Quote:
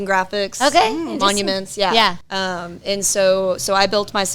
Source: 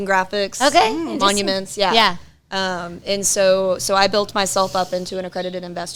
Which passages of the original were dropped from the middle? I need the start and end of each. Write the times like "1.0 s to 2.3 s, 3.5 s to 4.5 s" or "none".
2.3 s to 2.5 s